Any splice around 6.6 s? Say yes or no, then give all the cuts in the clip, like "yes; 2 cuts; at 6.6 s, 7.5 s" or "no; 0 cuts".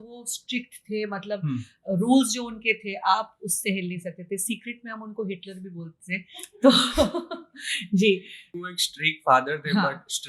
no; 1 cut; at 8.5 s